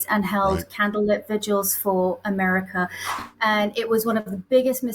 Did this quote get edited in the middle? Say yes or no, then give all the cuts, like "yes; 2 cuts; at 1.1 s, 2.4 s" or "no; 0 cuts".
yes; 1 cut; at 3.1 s